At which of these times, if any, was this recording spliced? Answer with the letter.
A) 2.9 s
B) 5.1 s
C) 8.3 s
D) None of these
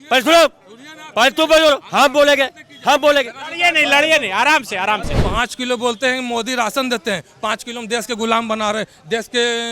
B